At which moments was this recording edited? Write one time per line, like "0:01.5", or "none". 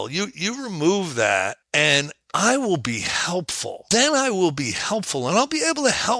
0:01.6
0:03.8